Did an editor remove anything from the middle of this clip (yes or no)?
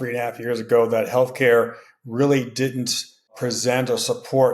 yes